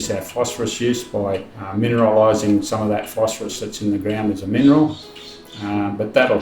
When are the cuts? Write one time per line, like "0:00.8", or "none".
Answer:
0:01.6